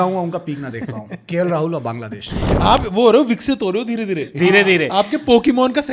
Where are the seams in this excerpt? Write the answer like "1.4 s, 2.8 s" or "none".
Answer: 2.4 s